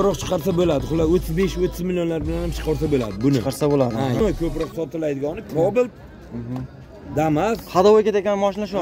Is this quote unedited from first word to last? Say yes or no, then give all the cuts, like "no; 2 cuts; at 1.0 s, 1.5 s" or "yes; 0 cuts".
no; 1 cut; at 4.2 s